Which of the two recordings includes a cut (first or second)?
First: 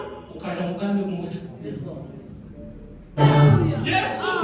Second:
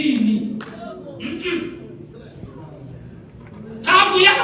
first